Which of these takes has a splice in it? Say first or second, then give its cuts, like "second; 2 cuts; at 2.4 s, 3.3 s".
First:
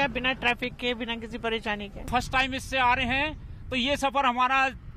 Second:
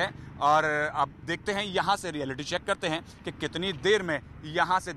first; 1 cut; at 2.1 s